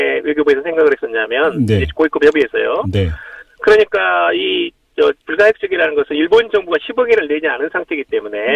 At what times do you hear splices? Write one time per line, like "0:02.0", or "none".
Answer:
0:01.9